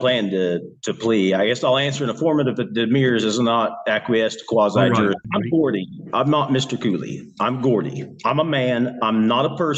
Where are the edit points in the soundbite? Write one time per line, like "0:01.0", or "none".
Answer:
0:05.2